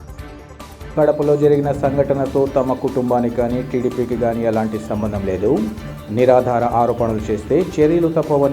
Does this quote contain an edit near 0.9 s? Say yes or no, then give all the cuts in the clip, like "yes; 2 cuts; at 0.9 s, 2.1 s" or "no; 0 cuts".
yes; 1 cut; at 0.9 s